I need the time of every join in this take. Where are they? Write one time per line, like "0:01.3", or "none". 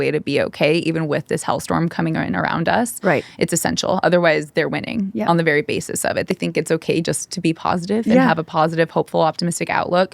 0:06.3